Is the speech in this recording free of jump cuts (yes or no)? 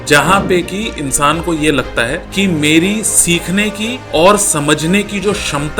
no